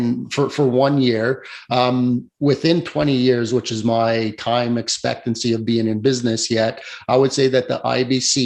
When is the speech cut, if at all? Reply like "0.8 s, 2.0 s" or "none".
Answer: none